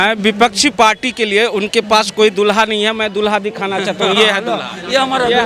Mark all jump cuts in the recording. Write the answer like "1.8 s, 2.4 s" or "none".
none